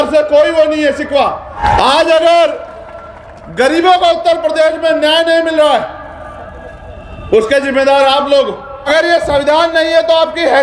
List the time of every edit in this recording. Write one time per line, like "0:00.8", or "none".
0:01.6
0:08.9